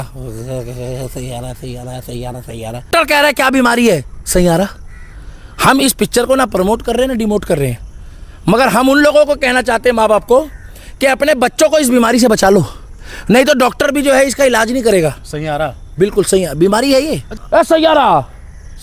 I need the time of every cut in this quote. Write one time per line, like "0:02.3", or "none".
0:02.9
0:17.4